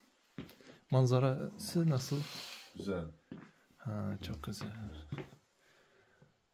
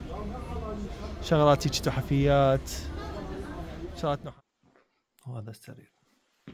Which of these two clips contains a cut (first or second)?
second